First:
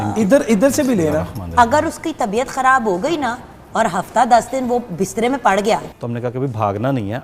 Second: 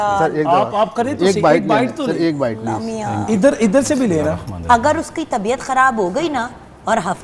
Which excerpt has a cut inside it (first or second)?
first